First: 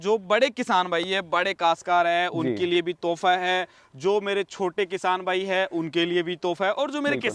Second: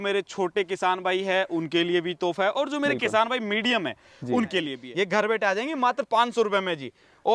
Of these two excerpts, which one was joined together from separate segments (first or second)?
second